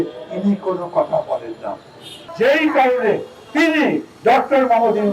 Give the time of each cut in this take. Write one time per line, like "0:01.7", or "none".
0:02.2